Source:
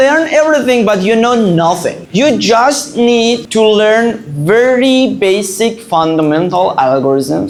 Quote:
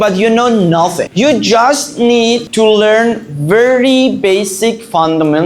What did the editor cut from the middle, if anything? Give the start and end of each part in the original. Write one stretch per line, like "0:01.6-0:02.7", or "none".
0:01.9-0:02.0